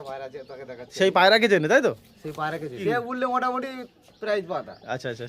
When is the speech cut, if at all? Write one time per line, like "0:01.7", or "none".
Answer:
0:02.8

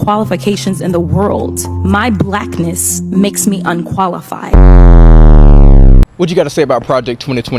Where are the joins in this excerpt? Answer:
0:06.0

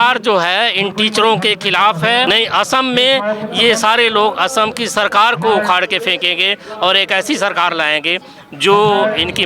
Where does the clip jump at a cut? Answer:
0:02.3

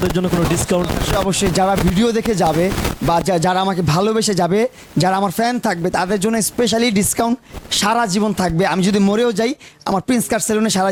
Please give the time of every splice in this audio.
none

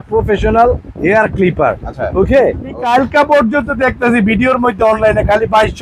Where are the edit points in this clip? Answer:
0:02.9

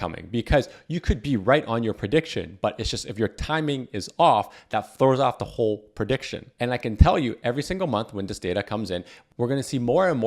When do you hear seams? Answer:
0:06.4

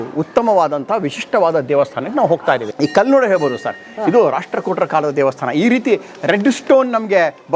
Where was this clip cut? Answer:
0:02.7

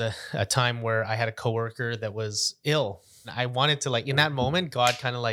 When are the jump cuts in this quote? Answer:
0:03.2

